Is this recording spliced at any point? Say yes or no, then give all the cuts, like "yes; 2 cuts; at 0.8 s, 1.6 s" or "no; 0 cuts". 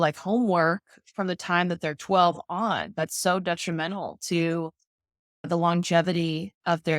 yes; 1 cut; at 5.5 s